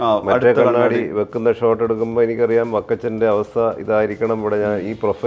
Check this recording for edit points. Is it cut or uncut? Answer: uncut